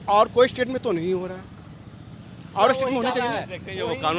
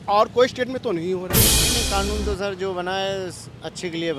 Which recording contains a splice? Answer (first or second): second